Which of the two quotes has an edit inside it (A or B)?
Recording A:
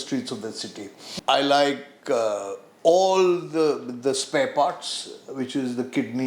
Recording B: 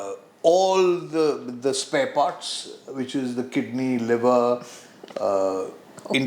A